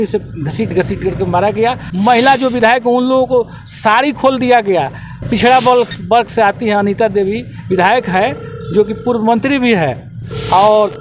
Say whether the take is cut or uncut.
cut